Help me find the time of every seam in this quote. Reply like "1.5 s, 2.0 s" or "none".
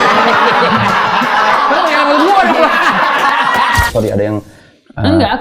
3.9 s